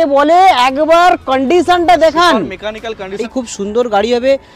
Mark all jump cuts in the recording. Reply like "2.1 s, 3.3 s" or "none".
3.2 s